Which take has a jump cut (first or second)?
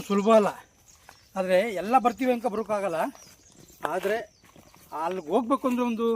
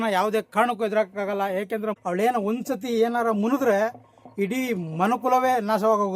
second